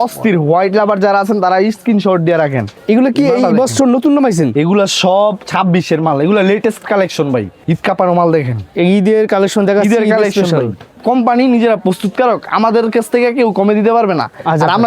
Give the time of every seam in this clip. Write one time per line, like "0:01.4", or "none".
0:02.7
0:07.5
0:11.0